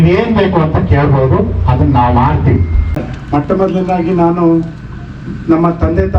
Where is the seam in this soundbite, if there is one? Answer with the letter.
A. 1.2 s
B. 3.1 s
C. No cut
B